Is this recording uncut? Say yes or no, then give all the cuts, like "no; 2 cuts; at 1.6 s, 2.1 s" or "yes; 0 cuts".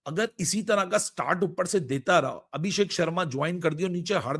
yes; 0 cuts